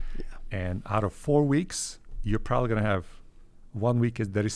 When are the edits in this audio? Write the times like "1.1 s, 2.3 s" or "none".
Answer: none